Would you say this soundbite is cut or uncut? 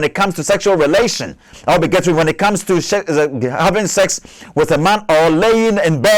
uncut